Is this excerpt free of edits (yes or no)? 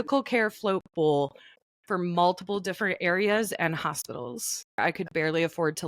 no